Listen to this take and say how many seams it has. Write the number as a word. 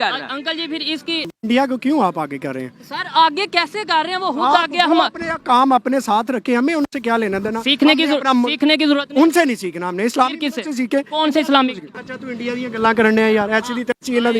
two